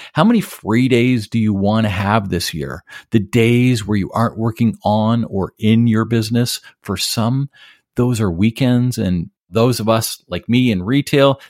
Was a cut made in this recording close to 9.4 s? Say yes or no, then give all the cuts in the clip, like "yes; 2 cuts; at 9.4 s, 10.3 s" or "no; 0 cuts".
yes; 1 cut; at 9.4 s